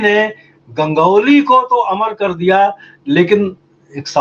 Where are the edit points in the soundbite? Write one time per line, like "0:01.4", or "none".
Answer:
none